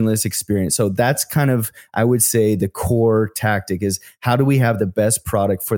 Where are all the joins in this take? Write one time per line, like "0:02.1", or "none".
none